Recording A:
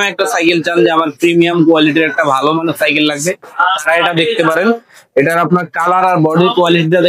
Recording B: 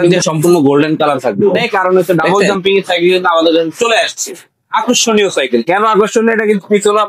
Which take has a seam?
B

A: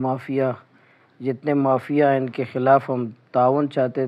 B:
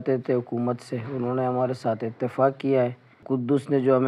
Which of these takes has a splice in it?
B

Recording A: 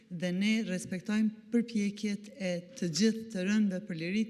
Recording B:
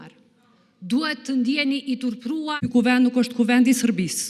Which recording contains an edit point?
B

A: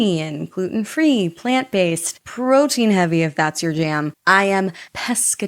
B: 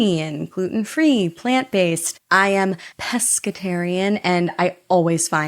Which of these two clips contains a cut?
B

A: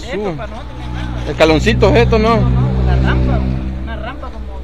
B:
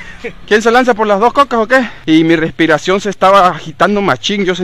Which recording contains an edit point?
B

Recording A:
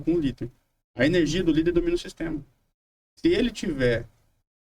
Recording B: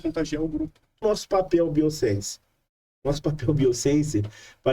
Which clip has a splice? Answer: B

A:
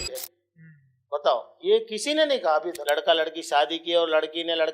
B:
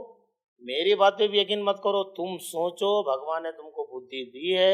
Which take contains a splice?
A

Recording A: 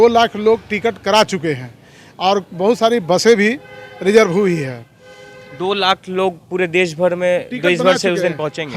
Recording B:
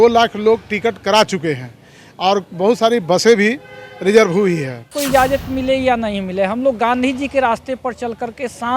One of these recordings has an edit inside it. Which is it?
B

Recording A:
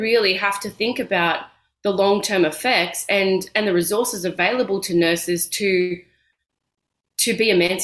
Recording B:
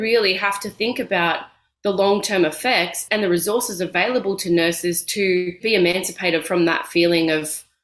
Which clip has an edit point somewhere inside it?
B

